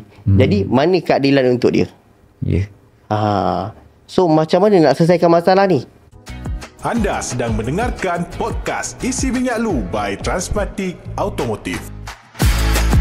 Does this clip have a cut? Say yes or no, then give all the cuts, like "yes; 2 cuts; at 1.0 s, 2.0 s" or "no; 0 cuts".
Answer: yes; 1 cut; at 6.2 s